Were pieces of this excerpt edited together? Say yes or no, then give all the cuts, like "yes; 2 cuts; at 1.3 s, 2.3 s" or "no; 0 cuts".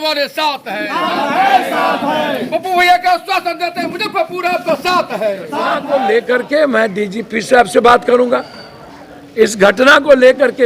yes; 1 cut; at 5.8 s